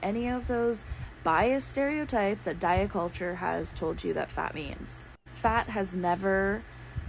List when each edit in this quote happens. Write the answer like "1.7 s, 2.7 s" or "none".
4.5 s